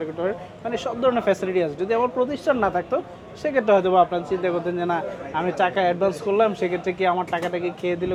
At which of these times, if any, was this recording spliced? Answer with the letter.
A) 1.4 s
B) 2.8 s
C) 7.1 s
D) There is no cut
D